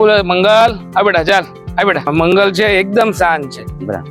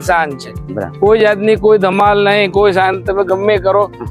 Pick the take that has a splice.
first; 1 cut; at 2.1 s

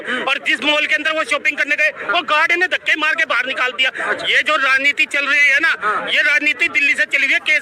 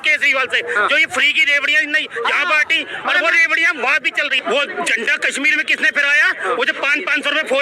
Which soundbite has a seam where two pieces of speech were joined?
second; 1 cut; at 4.4 s

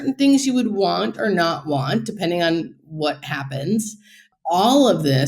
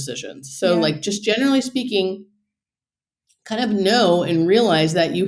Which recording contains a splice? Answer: first; 1 cut; at 4.2 s

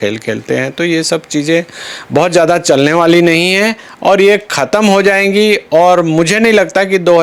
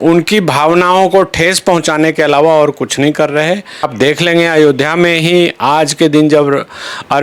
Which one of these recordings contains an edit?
second; 1 cut; at 3.9 s

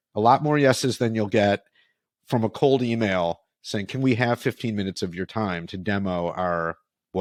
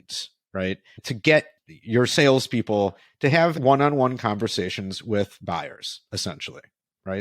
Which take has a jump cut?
second; 2 cuts; at 1.4 s, 3.6 s

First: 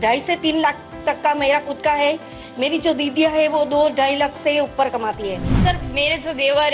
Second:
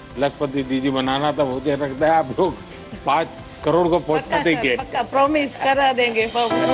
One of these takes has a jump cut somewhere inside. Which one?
first; 1 cut; at 5.5 s

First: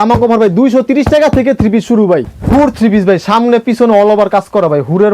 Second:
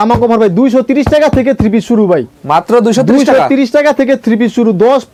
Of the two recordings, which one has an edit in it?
first; 1 cut; at 2.3 s

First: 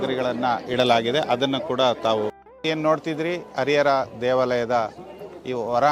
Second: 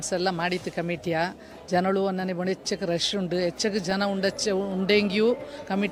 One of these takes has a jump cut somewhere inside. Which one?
first; 1 cut; at 2.4 s

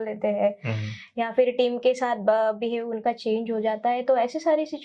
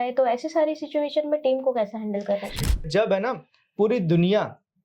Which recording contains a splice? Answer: second; 1 cut; at 2.9 s

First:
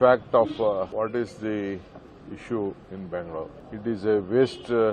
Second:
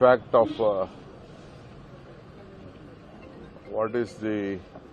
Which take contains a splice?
first; 2 cuts; at 0.9 s, 3.6 s

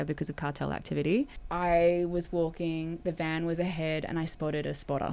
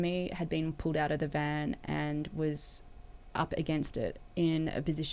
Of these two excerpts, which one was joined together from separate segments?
first; 1 cut; at 1.4 s

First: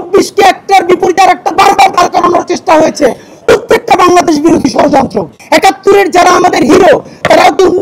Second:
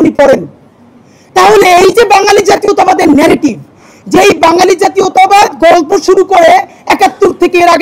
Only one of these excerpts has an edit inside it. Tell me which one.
first; 1 cut; at 5.3 s

